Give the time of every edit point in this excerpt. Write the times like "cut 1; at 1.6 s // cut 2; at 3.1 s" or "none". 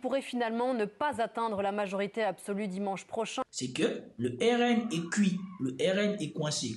cut 1; at 3.4 s